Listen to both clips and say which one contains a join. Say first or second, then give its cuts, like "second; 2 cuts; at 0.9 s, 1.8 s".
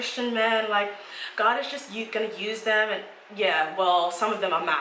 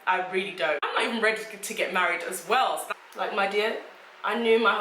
second; 2 cuts; at 0.8 s, 2.8 s